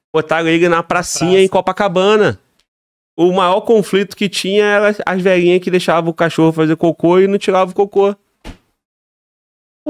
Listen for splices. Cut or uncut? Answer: uncut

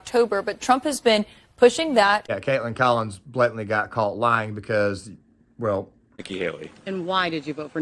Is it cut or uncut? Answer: uncut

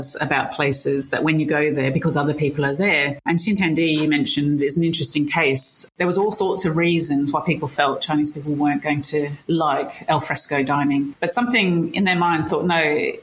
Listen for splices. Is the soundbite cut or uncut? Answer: cut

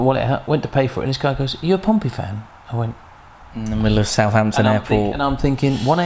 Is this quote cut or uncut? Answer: uncut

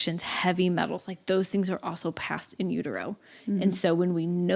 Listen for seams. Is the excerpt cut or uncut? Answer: uncut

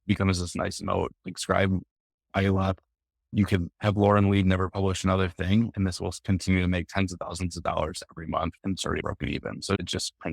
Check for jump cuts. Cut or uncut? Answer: cut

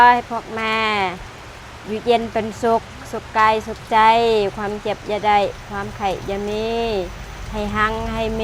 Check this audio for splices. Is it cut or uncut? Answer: uncut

